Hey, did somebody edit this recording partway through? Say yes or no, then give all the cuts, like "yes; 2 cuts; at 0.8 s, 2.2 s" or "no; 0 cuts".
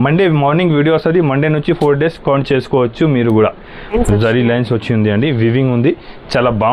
yes; 1 cut; at 3.9 s